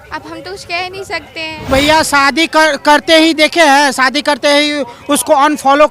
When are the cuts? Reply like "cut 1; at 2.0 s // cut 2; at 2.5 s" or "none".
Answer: cut 1; at 1.5 s

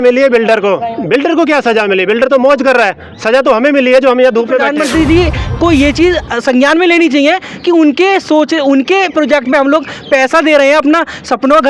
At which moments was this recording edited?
cut 1; at 4.7 s

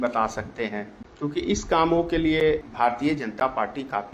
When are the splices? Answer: cut 1; at 1.0 s // cut 2; at 2.7 s

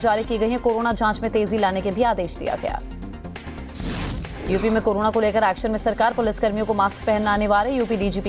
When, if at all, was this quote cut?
cut 1; at 4.1 s

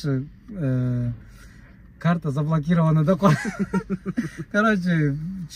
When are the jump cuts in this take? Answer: none

